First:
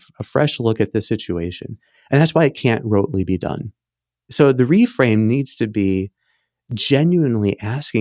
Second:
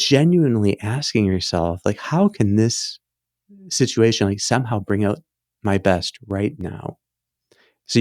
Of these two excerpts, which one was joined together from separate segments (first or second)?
first